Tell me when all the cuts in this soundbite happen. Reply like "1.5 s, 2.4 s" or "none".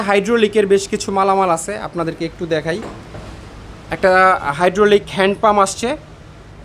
none